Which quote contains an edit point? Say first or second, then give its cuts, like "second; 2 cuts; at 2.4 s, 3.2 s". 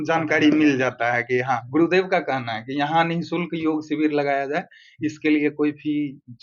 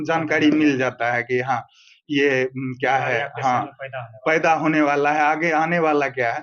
first; 1 cut; at 1.6 s